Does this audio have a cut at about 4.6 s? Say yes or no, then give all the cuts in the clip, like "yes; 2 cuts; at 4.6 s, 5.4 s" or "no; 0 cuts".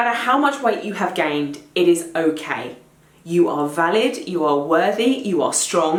no; 0 cuts